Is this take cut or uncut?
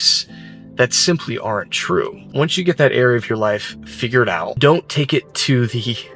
cut